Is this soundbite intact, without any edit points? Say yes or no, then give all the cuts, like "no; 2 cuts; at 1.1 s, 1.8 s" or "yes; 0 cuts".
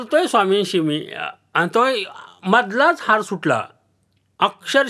yes; 0 cuts